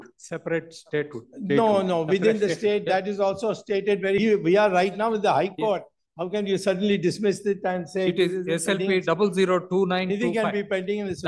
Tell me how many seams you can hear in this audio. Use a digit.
1